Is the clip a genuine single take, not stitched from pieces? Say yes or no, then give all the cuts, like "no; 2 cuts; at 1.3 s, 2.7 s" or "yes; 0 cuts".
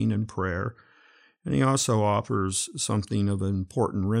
yes; 0 cuts